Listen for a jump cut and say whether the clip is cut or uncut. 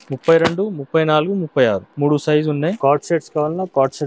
cut